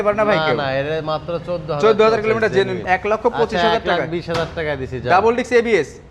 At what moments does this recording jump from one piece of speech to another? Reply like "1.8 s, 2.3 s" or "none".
2.8 s